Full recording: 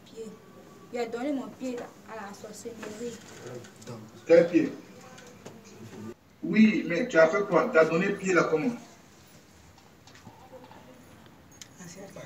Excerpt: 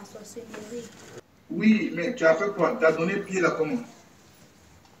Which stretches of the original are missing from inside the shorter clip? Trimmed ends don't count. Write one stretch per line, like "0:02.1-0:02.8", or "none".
0:03.5-0:06.2